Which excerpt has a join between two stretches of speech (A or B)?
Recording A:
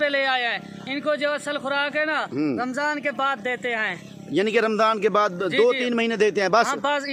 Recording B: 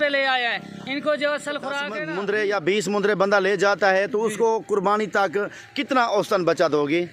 B